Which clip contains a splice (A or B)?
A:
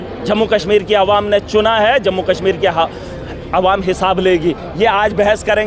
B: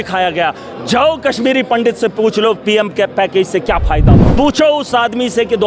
B